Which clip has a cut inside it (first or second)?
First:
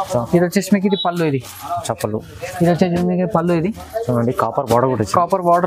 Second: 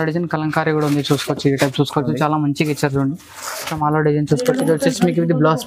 second